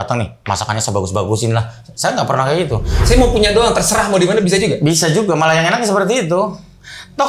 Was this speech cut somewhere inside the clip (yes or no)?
yes